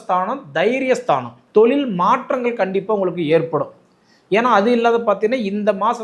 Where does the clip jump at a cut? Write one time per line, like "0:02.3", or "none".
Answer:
0:01.4